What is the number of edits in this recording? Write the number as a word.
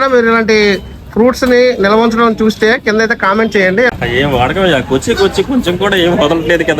one